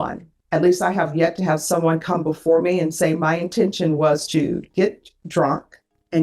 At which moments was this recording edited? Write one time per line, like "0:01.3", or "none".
none